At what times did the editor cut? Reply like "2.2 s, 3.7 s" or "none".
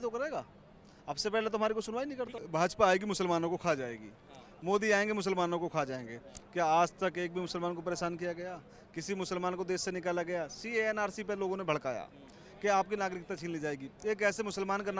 2.4 s

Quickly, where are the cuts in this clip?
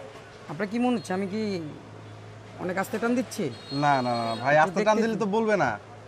none

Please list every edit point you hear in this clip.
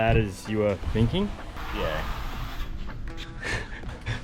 3.2 s

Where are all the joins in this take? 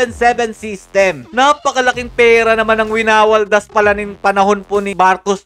1.3 s

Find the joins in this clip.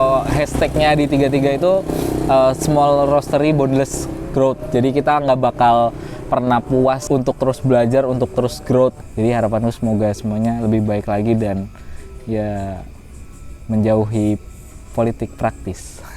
7.0 s, 9.0 s

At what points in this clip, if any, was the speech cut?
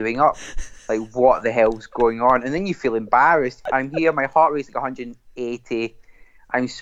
3.6 s

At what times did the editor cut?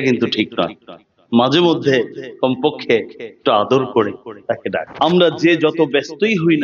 4.9 s

